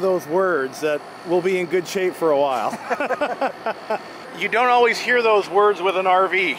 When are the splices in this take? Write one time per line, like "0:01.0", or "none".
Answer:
none